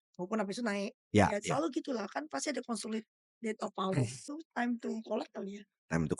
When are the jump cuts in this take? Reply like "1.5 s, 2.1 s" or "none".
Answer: 4.2 s